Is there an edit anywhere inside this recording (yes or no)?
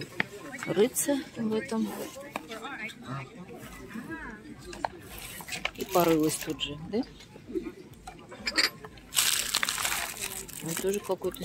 no